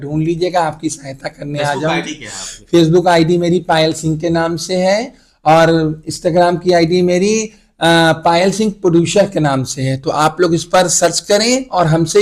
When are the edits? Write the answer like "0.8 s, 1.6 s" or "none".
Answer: none